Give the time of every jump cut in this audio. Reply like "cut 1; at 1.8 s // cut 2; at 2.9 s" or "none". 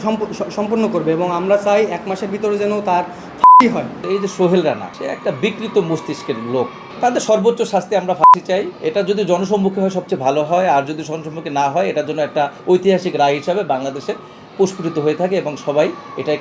cut 1; at 3.9 s // cut 2; at 6.8 s

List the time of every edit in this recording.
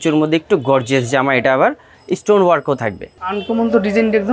none

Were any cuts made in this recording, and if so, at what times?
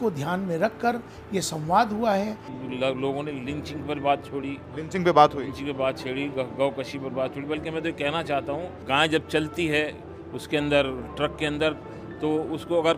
cut 1; at 2.5 s // cut 2; at 8.8 s

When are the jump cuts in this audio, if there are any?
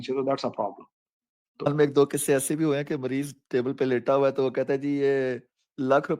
cut 1; at 1.7 s

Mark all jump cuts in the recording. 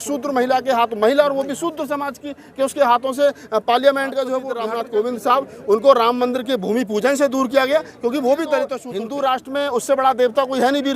cut 1; at 4.5 s // cut 2; at 8.8 s

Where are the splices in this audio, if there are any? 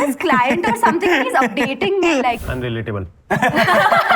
cut 1; at 2.5 s

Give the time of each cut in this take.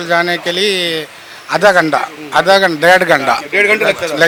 none

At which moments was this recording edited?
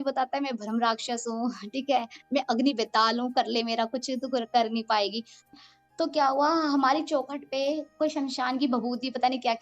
cut 1; at 5.5 s

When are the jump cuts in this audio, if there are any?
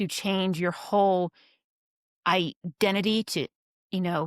none

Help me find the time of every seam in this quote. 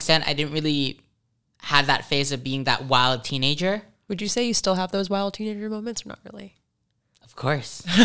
cut 1; at 3.9 s

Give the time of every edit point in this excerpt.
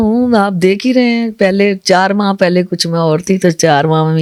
none

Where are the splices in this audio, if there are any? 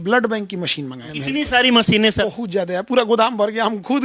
cut 1; at 1.1 s // cut 2; at 2.2 s

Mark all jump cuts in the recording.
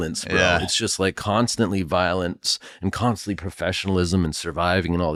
none

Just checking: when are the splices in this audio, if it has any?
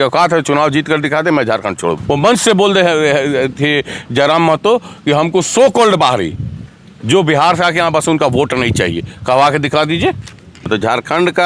cut 1; at 2.0 s // cut 2; at 10.7 s

